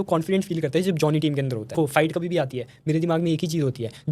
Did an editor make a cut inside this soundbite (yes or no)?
yes